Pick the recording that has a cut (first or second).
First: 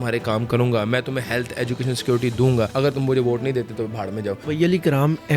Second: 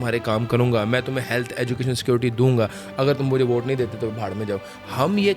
first